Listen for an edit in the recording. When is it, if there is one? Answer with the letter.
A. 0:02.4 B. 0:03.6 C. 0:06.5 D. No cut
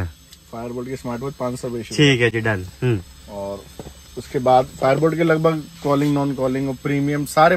D